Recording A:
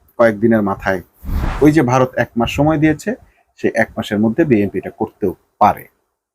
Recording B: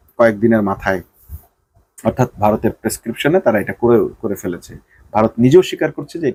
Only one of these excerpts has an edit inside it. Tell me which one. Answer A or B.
A